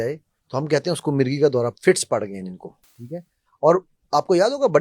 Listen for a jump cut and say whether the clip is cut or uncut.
uncut